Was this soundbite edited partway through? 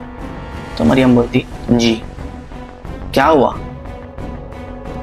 no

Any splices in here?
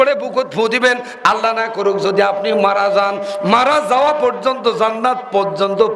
no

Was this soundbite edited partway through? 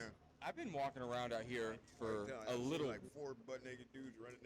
yes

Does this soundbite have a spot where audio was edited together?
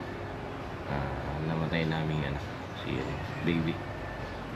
no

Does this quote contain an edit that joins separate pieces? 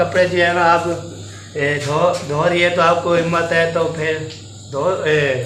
no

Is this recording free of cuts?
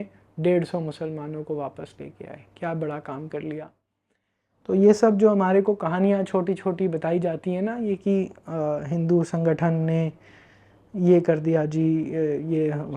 yes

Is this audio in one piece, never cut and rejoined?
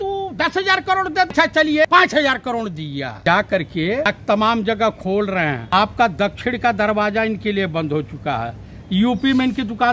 no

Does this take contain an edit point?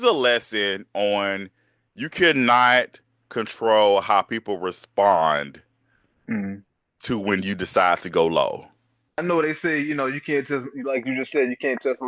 yes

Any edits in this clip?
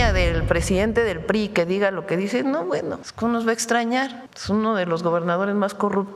yes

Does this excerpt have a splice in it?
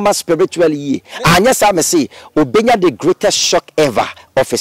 no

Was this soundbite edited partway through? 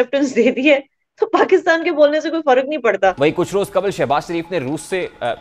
yes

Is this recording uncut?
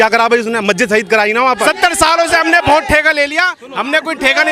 no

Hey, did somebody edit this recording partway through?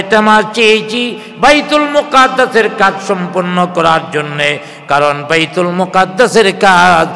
no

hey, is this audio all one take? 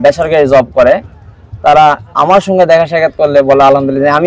yes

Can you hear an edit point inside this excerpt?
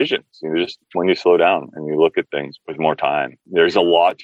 yes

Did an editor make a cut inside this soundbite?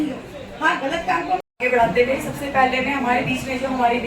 yes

